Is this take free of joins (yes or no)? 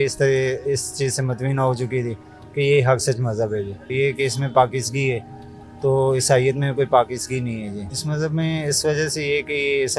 no